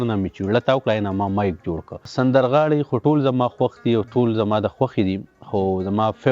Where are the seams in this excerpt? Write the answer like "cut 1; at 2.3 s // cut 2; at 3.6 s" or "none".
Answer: cut 1; at 2.1 s